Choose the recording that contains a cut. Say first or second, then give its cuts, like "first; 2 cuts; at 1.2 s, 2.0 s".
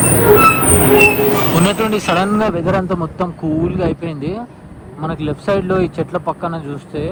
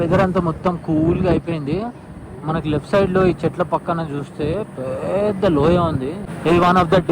second; 1 cut; at 6.2 s